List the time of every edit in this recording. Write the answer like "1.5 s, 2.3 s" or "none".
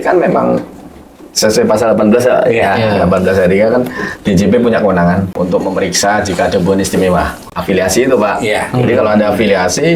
5.3 s, 7.4 s